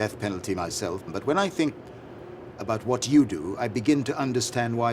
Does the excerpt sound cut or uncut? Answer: cut